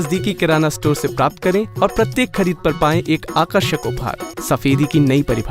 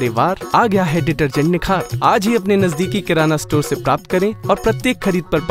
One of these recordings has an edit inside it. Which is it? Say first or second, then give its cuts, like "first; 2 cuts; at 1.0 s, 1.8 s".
first; 1 cut; at 4.3 s